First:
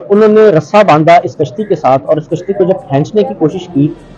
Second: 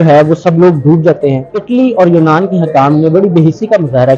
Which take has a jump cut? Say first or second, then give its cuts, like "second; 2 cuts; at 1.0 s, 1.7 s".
second; 1 cut; at 1.5 s